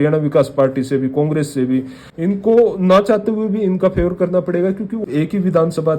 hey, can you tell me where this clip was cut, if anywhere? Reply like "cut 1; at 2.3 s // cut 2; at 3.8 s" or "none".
cut 1; at 2.0 s // cut 2; at 5.0 s